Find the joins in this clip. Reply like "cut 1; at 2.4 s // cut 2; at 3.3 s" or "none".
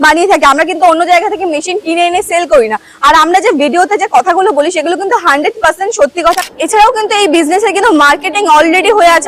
cut 1; at 6.4 s

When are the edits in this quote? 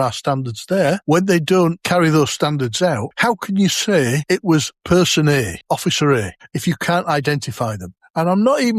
cut 1; at 1.0 s // cut 2; at 1.8 s // cut 3; at 3.1 s // cut 4; at 4.6 s // cut 5; at 5.6 s // cut 6; at 6.4 s

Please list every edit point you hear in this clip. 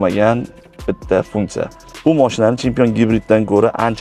cut 1; at 1.9 s

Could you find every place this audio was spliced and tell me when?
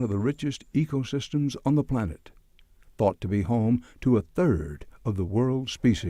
none

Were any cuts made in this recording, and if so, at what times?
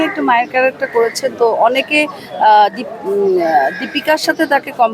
none

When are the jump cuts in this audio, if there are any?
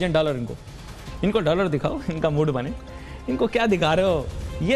none

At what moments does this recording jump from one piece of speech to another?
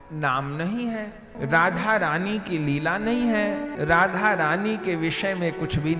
cut 1; at 1.2 s // cut 2; at 3.7 s

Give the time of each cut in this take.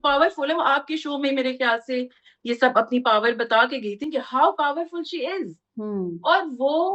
none

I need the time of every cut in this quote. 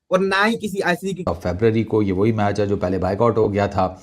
cut 1; at 1.3 s

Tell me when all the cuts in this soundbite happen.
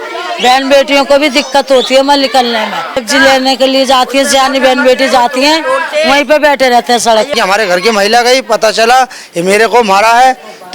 cut 1; at 3.0 s // cut 2; at 7.3 s

